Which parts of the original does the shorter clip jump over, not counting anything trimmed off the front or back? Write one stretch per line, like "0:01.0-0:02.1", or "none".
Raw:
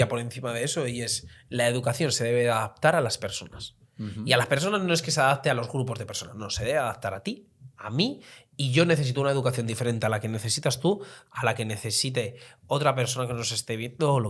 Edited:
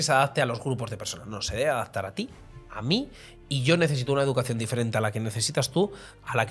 none